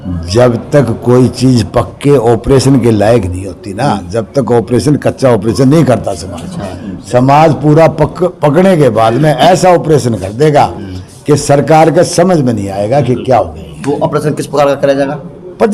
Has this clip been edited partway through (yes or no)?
no